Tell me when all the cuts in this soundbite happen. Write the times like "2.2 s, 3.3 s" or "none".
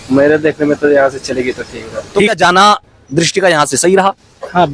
2.3 s